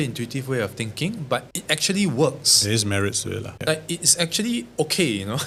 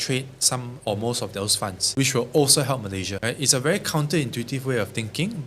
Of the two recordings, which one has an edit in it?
second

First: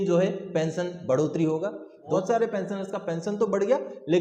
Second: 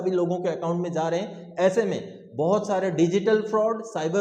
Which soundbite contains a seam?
first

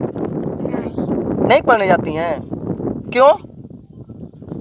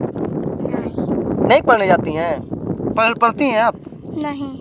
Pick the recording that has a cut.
second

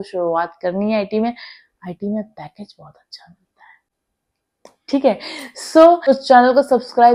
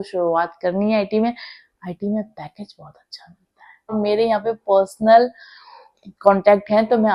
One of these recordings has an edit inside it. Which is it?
second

